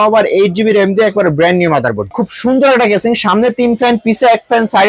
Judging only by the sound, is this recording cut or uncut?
cut